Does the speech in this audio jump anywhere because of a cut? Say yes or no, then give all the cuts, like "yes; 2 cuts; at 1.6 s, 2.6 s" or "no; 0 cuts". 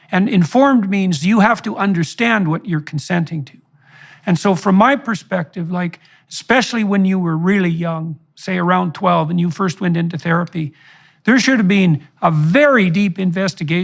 no; 0 cuts